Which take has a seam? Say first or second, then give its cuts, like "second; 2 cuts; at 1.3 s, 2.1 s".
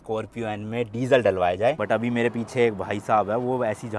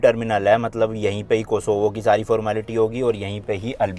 first; 1 cut; at 1.8 s